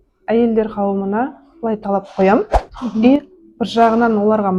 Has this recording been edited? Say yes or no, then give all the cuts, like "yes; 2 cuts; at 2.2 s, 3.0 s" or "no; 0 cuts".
no; 0 cuts